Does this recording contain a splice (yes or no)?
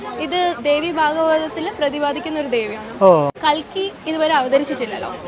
yes